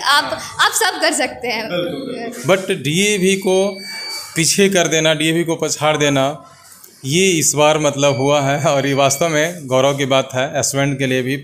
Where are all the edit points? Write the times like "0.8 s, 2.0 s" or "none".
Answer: 2.2 s